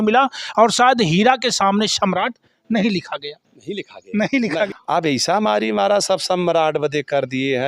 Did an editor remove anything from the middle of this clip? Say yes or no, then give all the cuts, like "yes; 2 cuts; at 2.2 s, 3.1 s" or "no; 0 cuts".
yes; 1 cut; at 4.7 s